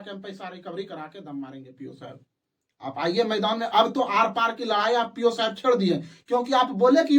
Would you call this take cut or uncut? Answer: uncut